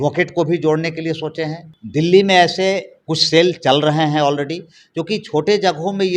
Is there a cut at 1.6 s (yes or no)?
yes